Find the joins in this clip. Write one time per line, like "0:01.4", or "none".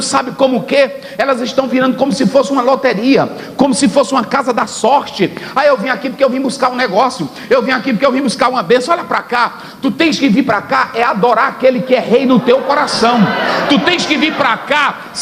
none